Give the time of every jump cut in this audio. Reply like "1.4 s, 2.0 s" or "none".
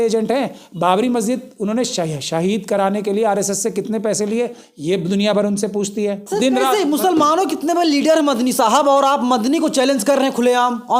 6.2 s